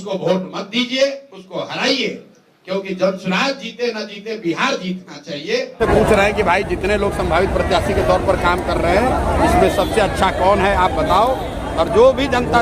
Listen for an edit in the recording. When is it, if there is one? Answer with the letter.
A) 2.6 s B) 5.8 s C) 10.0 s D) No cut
B